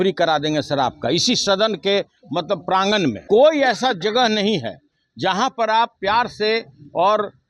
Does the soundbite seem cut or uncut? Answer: cut